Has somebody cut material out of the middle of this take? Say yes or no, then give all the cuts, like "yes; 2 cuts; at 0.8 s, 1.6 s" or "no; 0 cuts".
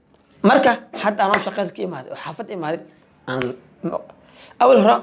no; 0 cuts